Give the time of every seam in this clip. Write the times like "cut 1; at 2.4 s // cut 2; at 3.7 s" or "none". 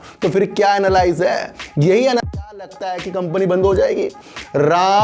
cut 1; at 2.2 s